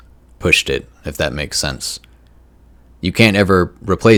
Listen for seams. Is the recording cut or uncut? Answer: uncut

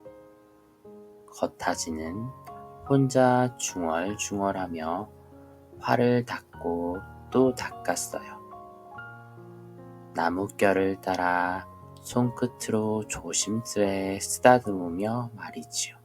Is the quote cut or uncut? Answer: cut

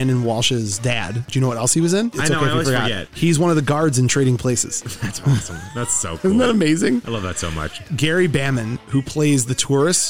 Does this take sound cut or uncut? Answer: cut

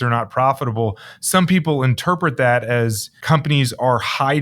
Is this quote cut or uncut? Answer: cut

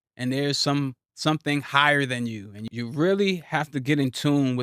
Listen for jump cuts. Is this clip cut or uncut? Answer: cut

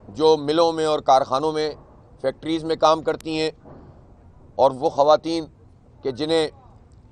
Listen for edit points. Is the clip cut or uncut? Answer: uncut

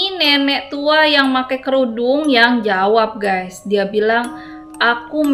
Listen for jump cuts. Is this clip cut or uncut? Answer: uncut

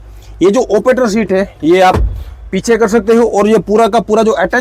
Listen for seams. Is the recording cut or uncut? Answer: uncut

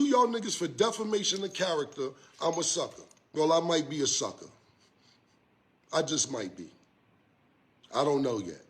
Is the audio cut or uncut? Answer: uncut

